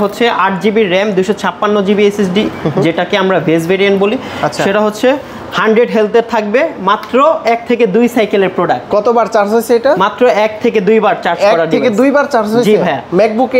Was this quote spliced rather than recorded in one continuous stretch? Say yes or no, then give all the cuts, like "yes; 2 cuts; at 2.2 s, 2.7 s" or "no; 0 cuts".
no; 0 cuts